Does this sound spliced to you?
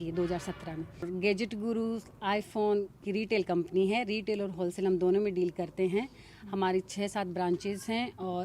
no; 0 cuts

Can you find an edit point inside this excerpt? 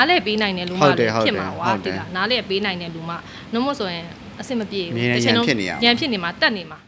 no; 0 cuts

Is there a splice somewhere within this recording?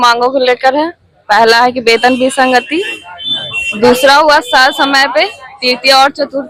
no; 0 cuts

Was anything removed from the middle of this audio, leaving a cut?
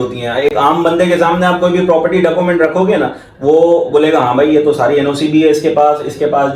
no; 0 cuts

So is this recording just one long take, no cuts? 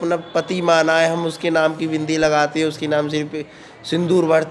yes; 0 cuts

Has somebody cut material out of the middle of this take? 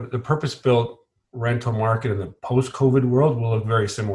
no; 0 cuts

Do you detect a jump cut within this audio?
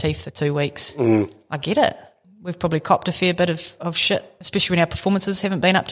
yes; 2 cuts; at 2.2 s, 4.4 s

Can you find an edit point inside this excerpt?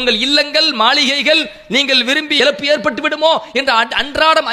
yes; 1 cut; at 2.4 s

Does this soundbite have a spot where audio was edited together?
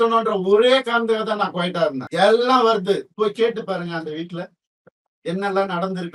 yes; 2 cuts; at 2.0 s, 3.1 s

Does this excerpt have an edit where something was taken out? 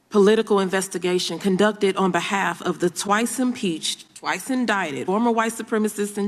yes; 1 cut; at 5.0 s

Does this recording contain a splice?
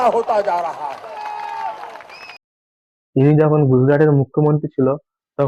no; 0 cuts

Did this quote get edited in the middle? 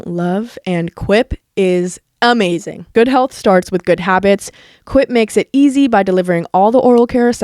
yes; 1 cut; at 2.7 s

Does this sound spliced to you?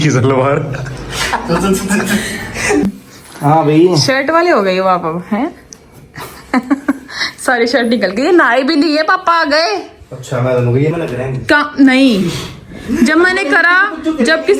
yes; 2 cuts; at 2.8 s, 10.9 s

